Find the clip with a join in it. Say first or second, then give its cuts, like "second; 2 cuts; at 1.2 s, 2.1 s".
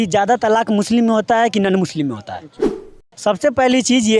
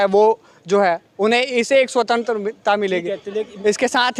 first; 1 cut; at 2.7 s